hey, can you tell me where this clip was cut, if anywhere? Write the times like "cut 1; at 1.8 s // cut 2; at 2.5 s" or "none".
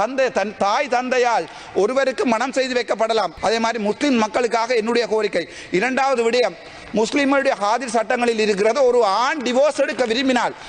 cut 1; at 3.3 s